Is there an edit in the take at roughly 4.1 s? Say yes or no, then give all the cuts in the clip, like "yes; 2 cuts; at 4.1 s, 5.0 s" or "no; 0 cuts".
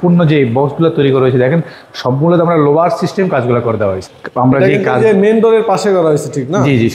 yes; 1 cut; at 4.1 s